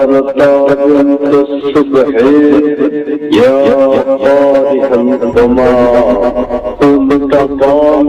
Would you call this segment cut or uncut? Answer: uncut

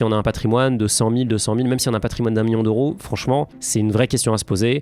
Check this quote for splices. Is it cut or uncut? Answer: uncut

